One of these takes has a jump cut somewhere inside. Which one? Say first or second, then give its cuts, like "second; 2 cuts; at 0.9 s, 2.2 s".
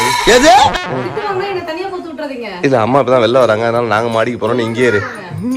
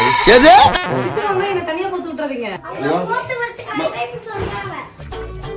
second; 1 cut; at 2.5 s